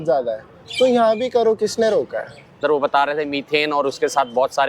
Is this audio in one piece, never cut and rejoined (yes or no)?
no